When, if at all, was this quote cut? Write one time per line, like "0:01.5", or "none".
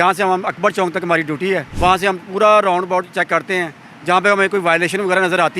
0:01.7